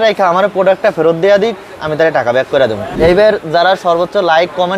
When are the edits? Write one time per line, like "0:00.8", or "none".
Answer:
0:02.9